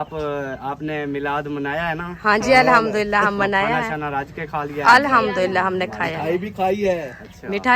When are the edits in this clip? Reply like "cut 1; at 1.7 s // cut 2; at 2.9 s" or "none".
none